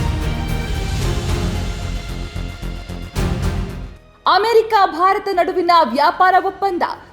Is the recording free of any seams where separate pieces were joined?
no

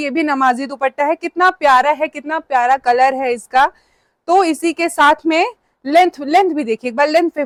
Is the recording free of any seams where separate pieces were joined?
yes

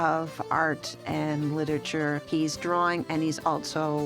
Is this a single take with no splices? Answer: no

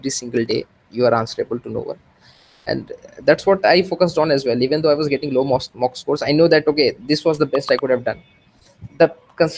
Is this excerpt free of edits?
yes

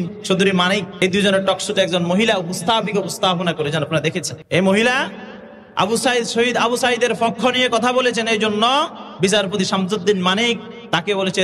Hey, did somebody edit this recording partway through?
yes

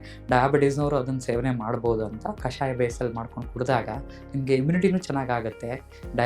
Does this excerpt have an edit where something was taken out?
yes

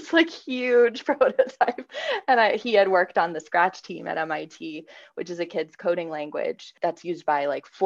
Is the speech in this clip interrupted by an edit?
yes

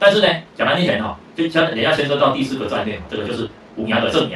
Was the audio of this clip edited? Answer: no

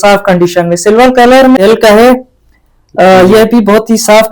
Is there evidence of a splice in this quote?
yes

